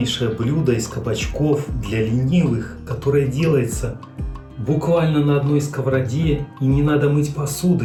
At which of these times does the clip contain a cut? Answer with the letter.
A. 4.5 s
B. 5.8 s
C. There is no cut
C